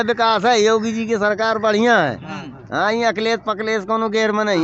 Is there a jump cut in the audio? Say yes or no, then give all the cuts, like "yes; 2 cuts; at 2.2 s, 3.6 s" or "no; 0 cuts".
no; 0 cuts